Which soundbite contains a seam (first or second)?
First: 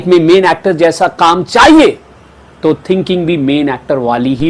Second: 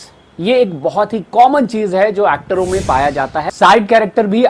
second